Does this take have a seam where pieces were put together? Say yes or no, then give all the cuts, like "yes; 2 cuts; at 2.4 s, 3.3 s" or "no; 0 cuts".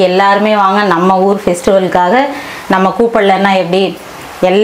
no; 0 cuts